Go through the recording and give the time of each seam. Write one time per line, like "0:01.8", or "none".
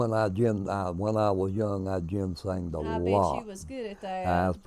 none